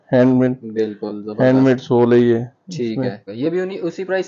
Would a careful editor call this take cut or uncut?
uncut